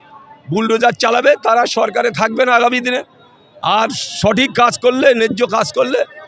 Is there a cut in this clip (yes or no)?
no